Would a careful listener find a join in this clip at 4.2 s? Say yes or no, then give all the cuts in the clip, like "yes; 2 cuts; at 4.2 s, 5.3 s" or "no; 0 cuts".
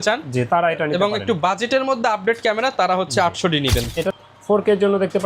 yes; 1 cut; at 4.2 s